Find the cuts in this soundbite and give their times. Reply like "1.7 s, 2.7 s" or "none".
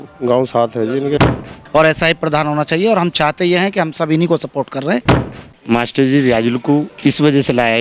1.2 s, 5.4 s